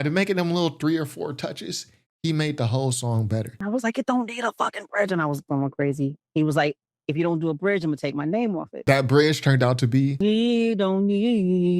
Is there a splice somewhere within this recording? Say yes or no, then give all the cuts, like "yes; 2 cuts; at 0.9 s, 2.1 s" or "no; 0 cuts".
yes; 3 cuts; at 3.5 s, 8.8 s, 10.1 s